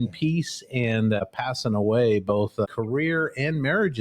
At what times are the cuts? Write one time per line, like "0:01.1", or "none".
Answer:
0:01.2
0:02.6